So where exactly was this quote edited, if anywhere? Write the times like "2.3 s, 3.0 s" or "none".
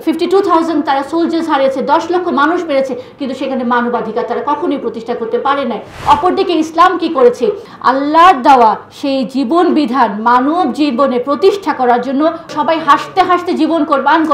5.9 s, 7.7 s, 12.5 s